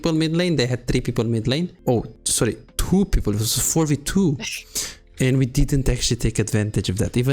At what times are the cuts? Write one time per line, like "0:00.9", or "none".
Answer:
0:02.2